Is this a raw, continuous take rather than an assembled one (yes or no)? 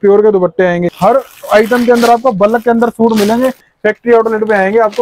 no